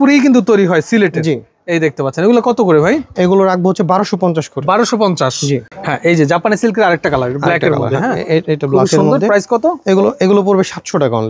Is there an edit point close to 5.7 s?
yes; 1 cut; at 5.7 s

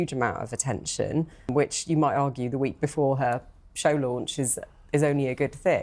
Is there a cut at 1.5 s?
yes; 1 cut; at 1.5 s

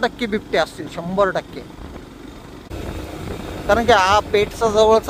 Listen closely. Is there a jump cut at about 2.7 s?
yes; 1 cut; at 2.7 s

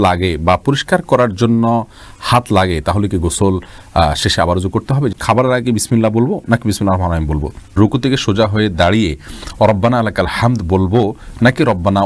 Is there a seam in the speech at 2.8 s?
no; 2 cuts; at 5.2 s, 7.7 s

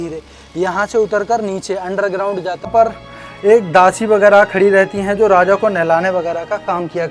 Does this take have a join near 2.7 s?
yes; 1 cut; at 2.7 s

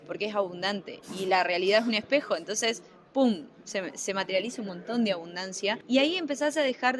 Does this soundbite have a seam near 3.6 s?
no; 1 cut; at 5.8 s

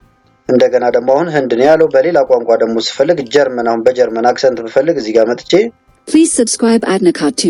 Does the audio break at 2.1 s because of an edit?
no; 0 cuts

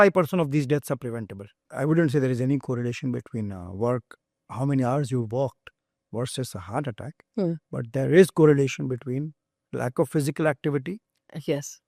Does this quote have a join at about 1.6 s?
yes; 1 cut; at 1.6 s

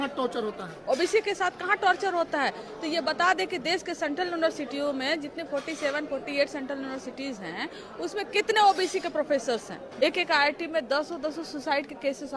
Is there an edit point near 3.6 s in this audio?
no; 1 cut; at 9.9 s

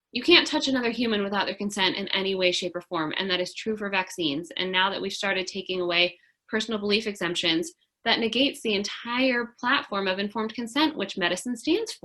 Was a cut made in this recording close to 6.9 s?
no; 0 cuts

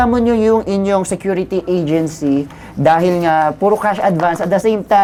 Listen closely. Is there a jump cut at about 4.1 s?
no; 0 cuts

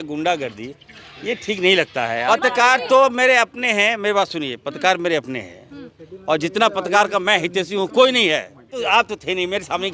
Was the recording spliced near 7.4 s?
no; 2 cuts; at 2.2 s, 8.8 s

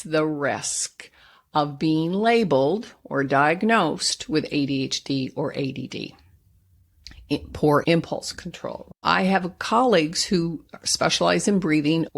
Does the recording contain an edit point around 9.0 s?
yes; 1 cut; at 9.0 s

